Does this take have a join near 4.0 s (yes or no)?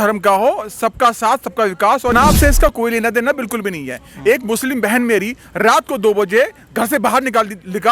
no